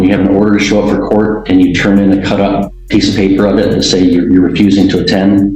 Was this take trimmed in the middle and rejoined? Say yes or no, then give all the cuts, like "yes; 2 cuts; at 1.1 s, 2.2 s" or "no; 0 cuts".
yes; 1 cut; at 2.7 s